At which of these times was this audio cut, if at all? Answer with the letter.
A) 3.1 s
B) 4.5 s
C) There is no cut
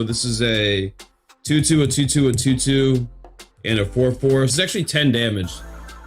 B